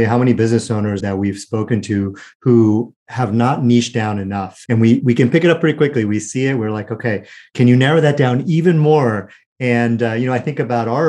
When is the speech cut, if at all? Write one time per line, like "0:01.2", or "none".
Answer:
0:01.0
0:04.5
0:07.4